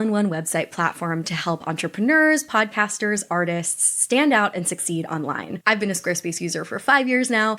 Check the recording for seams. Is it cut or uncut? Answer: cut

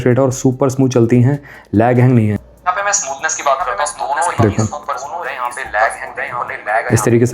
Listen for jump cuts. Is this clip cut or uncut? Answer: cut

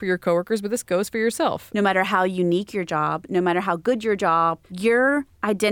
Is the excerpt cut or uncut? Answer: cut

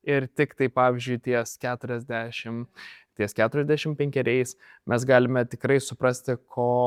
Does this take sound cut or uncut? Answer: uncut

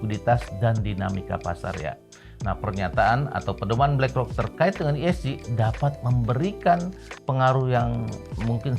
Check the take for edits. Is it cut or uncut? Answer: cut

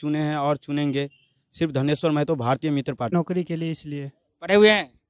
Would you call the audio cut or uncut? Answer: cut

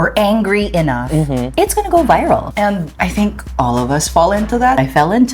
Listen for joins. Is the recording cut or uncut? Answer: uncut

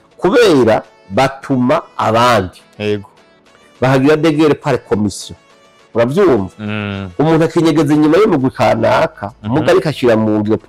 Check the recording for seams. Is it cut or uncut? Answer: uncut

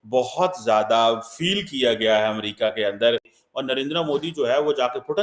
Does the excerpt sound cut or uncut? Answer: cut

